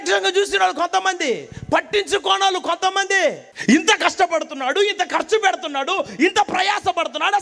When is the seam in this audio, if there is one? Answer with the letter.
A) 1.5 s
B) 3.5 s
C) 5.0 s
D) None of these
B